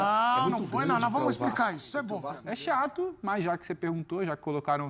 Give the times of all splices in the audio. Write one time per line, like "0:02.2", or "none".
0:02.3